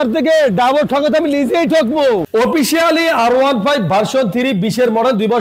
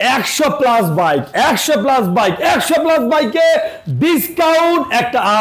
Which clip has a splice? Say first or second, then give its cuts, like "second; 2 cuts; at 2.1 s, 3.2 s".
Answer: first; 1 cut; at 2.3 s